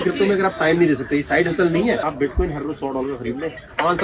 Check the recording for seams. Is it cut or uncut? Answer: cut